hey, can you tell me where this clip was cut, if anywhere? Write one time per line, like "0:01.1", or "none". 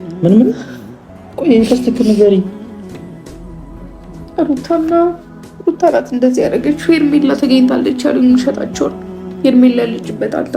0:02.5
0:04.3